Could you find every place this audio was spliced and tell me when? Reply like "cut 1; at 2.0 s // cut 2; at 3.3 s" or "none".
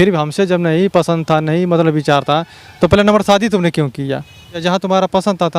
cut 1; at 4.6 s